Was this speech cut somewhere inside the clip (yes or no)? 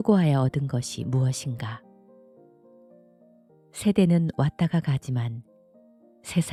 no